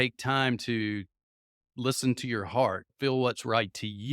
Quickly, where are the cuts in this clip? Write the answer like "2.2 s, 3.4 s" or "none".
2.9 s